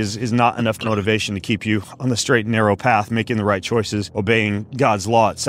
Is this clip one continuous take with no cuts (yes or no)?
no